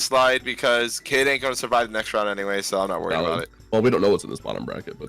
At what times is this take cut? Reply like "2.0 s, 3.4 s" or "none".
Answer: 3.6 s